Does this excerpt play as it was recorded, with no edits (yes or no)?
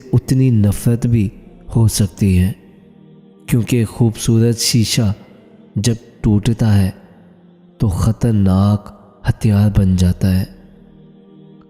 no